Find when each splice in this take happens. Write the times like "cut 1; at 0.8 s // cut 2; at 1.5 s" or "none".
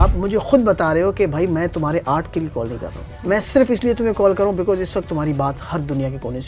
cut 1; at 3.1 s